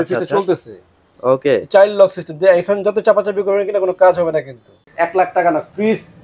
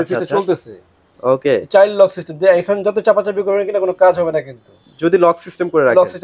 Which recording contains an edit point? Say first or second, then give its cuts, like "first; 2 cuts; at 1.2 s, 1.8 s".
first; 1 cut; at 4.9 s